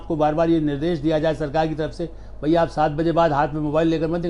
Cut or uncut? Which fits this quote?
uncut